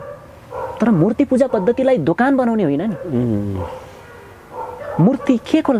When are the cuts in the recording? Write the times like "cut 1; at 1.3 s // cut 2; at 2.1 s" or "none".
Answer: none